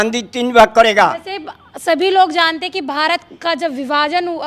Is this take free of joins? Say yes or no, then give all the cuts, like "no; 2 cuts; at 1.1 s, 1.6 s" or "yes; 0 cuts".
yes; 0 cuts